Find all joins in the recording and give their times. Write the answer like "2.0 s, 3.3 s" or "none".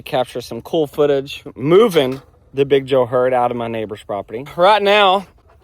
1.5 s, 4.5 s